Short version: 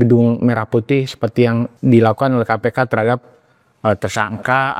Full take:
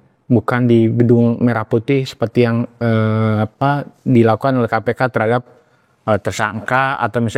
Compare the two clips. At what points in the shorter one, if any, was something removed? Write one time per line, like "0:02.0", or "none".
0:01.7